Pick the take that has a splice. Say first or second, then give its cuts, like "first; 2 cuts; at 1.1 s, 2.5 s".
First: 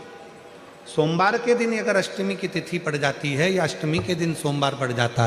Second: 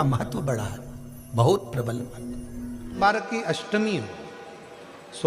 second; 1 cut; at 3.0 s